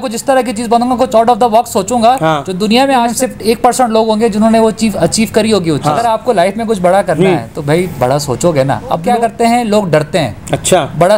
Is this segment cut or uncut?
cut